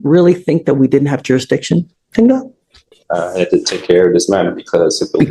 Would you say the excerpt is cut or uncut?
uncut